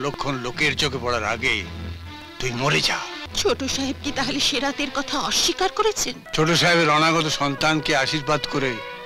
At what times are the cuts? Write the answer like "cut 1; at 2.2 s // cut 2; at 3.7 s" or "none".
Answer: cut 1; at 3.2 s // cut 2; at 6.2 s